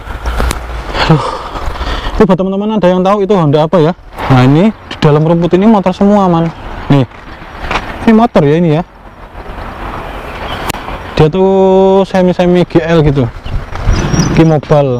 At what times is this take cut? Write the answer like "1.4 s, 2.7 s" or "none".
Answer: 4.1 s, 14.0 s